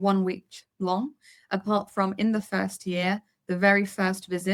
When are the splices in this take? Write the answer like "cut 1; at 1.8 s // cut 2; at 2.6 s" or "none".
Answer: none